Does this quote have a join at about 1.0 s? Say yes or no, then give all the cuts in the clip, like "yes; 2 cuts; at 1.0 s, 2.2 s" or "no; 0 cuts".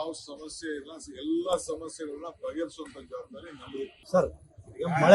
no; 1 cut; at 4.0 s